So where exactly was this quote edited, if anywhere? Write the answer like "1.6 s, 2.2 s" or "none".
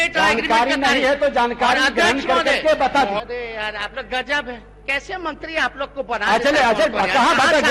3.2 s